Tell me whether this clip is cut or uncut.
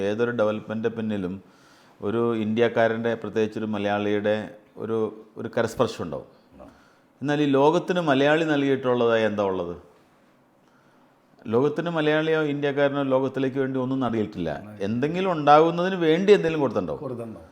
uncut